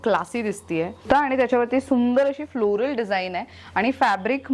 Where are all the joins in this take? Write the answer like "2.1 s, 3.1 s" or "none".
1.0 s